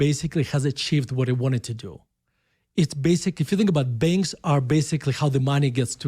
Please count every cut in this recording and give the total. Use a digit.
0